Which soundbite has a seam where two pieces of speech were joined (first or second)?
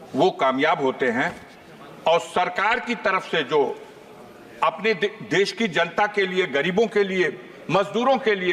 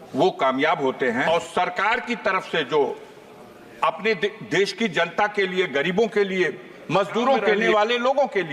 second